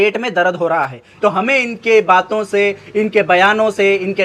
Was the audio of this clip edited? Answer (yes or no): yes